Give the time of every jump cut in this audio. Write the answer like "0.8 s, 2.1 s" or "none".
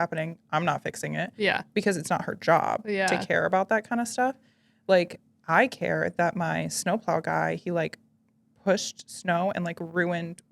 5.2 s